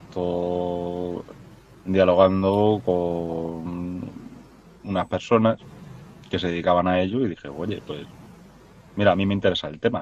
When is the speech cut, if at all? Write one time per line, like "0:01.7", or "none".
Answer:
0:01.4